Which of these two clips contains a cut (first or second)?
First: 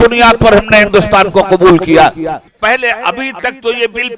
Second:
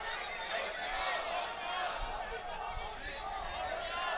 first